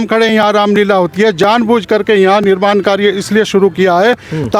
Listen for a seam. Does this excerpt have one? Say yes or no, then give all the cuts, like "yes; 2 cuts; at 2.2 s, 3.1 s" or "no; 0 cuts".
no; 0 cuts